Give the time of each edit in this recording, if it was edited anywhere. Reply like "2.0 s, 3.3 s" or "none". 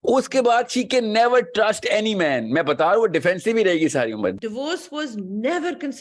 4.3 s